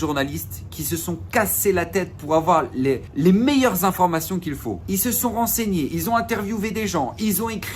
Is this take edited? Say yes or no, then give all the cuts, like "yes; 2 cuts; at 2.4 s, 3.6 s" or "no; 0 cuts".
yes; 2 cuts; at 3.1 s, 4.7 s